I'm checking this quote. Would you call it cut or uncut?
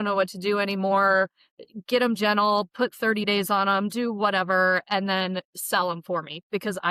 uncut